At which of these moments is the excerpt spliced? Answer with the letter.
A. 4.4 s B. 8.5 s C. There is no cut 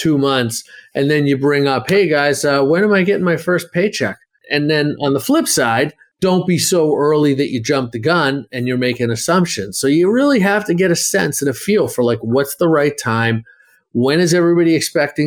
A